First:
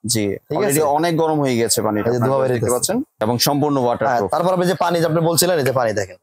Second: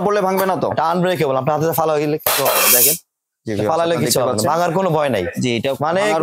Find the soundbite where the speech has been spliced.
first; 1 cut; at 3.2 s

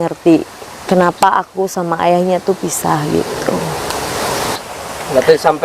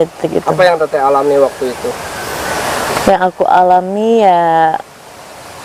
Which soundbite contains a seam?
first; 1 cut; at 4.6 s

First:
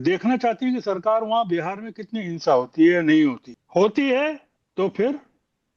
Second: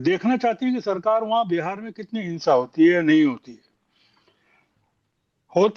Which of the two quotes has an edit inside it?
first; 2 cuts; at 3.5 s, 4.5 s

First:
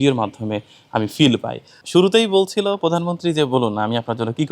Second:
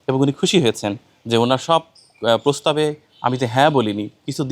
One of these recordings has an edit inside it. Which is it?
first; 1 cut; at 1.8 s

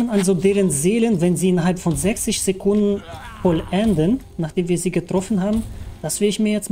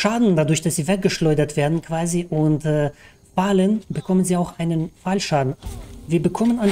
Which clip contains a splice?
second; 1 cut; at 5.6 s

